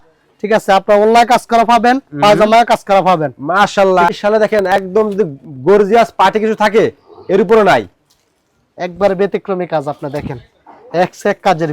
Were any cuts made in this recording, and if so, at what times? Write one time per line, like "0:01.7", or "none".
0:04.1